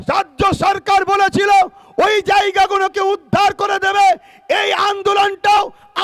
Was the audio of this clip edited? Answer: no; 0 cuts

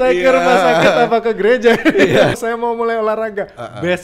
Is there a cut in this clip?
yes; 1 cut; at 2.3 s

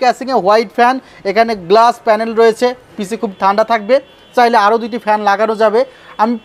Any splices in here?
no; 0 cuts

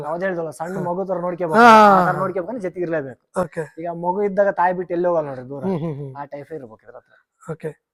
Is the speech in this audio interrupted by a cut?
no; 0 cuts

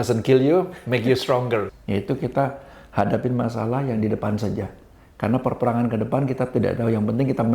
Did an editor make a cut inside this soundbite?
yes; 1 cut; at 1.8 s

